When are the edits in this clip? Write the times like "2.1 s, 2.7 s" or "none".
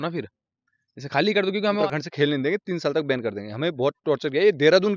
1.8 s